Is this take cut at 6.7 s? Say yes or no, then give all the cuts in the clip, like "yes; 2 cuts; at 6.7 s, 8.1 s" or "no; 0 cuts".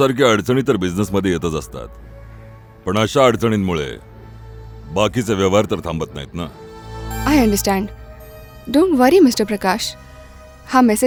no; 0 cuts